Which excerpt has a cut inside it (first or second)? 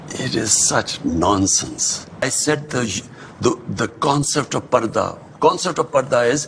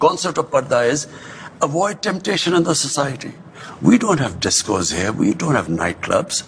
first